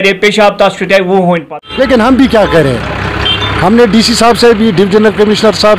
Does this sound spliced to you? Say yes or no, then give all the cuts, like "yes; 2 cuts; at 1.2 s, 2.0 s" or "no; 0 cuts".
yes; 1 cut; at 1.4 s